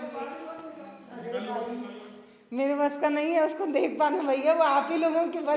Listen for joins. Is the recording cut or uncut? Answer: uncut